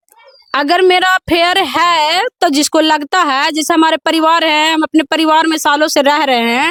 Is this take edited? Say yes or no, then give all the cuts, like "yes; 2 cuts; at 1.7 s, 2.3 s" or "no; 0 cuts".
no; 0 cuts